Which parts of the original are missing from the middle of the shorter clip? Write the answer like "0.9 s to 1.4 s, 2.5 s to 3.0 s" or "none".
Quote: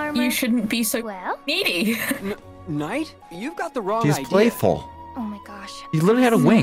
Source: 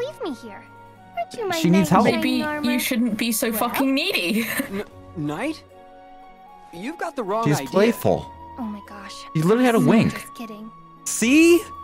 5.7 s to 6.6 s